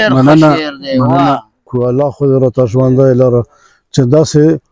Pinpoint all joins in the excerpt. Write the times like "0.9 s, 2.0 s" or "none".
1.7 s